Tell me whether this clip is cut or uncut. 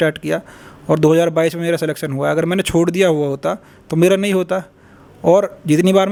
uncut